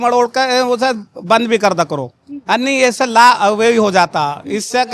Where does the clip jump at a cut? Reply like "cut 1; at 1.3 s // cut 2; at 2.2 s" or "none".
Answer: none